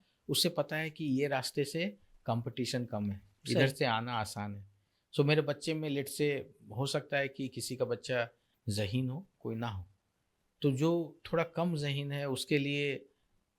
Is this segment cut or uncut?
cut